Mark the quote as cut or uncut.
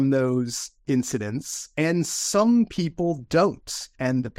cut